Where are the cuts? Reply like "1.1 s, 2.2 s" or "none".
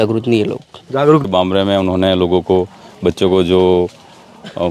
1.3 s